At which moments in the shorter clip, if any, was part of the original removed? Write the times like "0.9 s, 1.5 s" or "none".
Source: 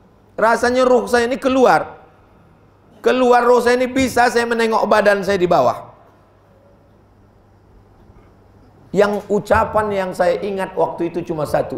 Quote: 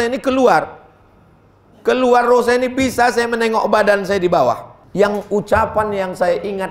4.7 s